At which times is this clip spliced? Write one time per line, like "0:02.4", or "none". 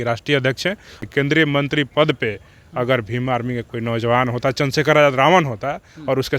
0:01.0